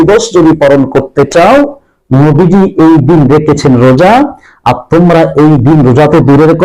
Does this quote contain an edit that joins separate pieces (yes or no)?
no